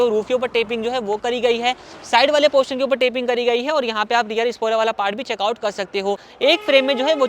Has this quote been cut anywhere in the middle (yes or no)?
yes